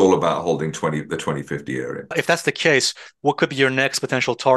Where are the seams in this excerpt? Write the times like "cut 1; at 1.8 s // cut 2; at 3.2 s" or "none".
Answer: cut 1; at 2.1 s